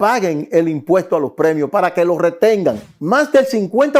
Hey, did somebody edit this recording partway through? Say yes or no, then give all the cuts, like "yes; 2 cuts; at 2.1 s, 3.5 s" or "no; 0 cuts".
yes; 1 cut; at 2.9 s